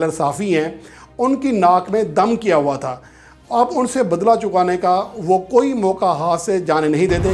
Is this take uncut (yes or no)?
yes